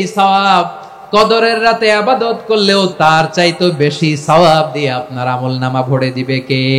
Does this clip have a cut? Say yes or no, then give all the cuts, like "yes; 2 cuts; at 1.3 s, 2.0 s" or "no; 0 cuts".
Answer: yes; 1 cut; at 2.9 s